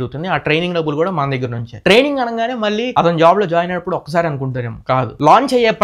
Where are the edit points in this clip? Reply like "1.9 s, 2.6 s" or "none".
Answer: none